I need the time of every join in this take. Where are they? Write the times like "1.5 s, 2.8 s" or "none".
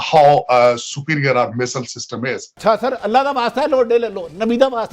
2.5 s